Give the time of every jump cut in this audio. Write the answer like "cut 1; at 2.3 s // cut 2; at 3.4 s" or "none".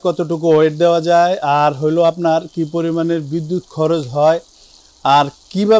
none